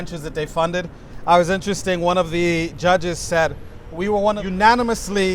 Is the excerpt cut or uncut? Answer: uncut